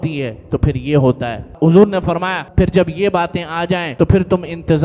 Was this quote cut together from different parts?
yes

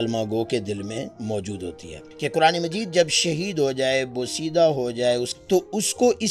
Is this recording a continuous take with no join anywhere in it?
no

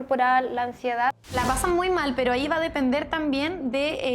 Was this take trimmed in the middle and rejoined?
yes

